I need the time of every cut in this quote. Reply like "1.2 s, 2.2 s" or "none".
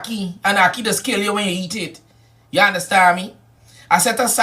2.2 s